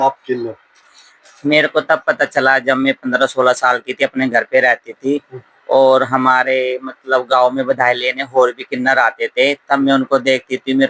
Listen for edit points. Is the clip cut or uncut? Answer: uncut